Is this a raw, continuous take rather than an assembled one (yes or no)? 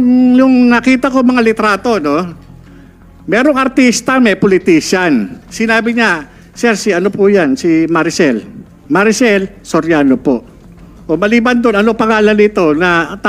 no